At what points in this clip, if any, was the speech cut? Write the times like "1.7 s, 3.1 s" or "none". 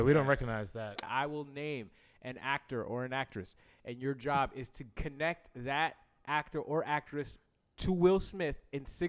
1.1 s